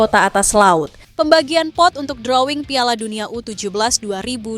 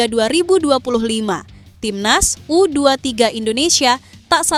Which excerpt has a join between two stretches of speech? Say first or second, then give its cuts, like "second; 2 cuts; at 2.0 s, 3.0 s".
first; 1 cut; at 1.0 s